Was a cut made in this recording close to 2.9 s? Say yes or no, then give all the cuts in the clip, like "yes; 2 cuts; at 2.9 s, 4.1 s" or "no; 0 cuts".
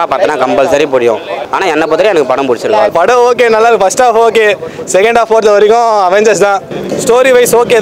yes; 2 cuts; at 2.9 s, 6.8 s